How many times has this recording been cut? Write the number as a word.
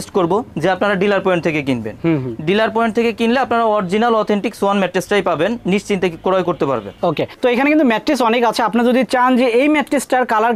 zero